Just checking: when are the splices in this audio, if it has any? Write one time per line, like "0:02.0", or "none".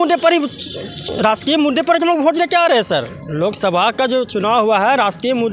none